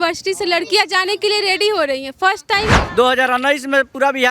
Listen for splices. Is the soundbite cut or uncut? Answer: cut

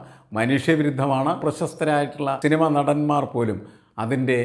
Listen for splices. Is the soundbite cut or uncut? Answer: cut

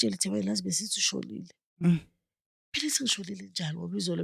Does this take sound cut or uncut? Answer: uncut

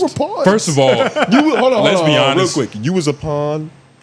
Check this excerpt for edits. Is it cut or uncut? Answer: uncut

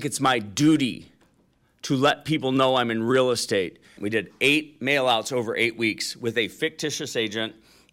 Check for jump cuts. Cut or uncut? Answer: cut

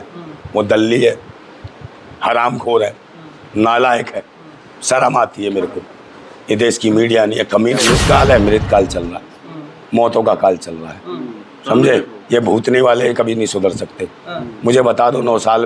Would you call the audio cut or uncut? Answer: cut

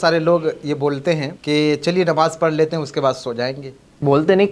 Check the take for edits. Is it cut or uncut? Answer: cut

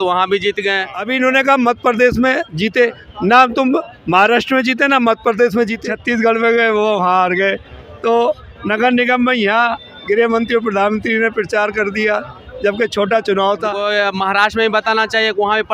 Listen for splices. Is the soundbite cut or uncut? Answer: cut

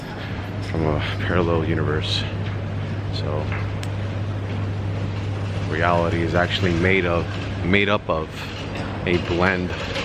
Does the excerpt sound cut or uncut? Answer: uncut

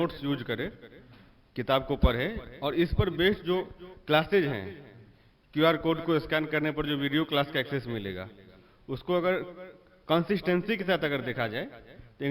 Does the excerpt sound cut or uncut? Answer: uncut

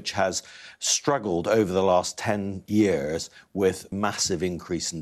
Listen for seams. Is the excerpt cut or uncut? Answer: cut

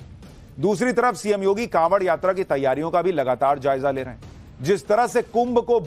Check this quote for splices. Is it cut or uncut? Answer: cut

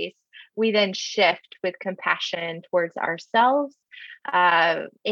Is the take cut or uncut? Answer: uncut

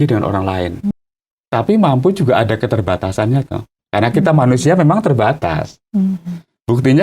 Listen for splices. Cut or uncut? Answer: cut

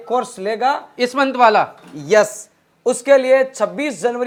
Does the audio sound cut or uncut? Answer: uncut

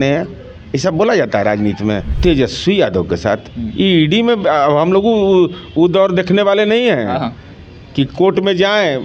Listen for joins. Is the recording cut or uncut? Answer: cut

